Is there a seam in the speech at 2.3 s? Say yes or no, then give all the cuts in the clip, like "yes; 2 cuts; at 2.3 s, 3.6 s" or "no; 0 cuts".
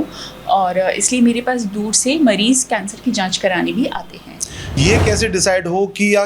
no; 1 cut; at 4.8 s